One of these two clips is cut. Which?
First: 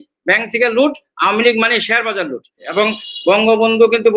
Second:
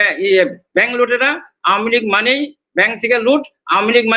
first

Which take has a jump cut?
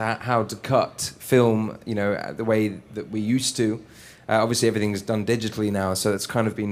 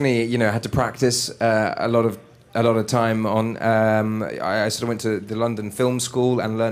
second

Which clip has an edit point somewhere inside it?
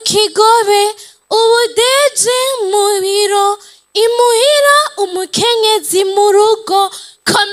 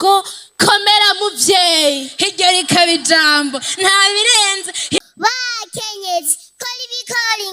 second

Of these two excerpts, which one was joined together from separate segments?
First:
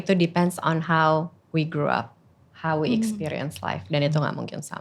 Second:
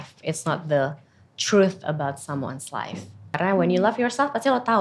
second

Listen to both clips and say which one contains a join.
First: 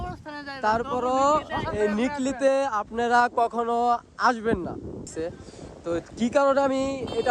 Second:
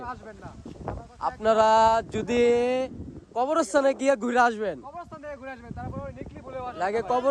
first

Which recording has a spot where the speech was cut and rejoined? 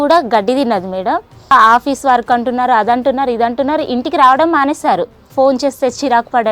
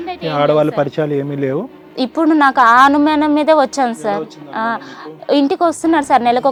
first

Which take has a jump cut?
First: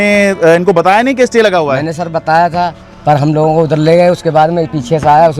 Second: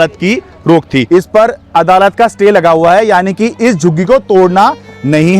second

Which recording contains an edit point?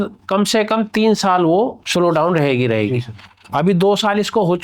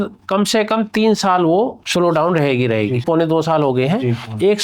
second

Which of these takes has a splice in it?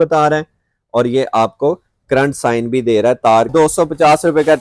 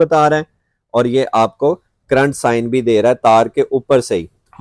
first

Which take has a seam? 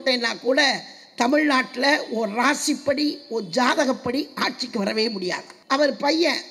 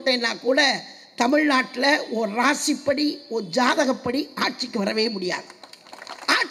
first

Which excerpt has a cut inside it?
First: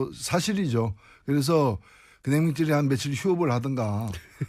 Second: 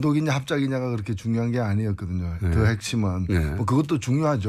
first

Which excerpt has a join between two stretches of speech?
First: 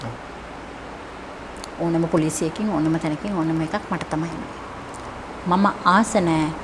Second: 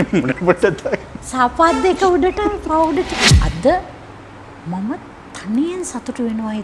second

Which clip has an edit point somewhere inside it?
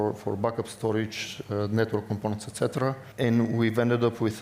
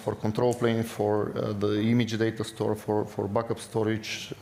first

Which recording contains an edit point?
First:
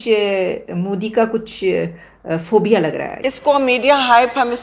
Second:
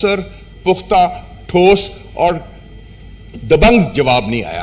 first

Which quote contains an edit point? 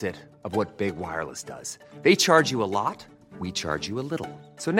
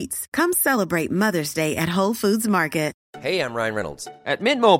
second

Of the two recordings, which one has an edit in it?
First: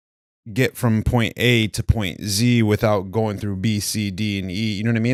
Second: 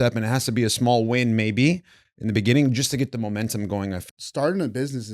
second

